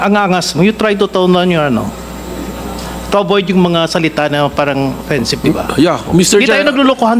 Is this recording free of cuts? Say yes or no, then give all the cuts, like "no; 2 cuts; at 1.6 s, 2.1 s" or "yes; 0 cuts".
yes; 0 cuts